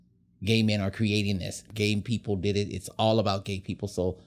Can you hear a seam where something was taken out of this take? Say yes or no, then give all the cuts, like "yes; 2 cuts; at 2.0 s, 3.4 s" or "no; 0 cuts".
yes; 1 cut; at 1.6 s